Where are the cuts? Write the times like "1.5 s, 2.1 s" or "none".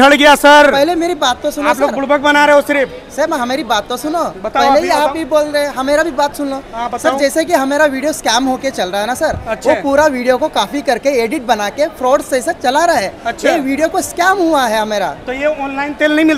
none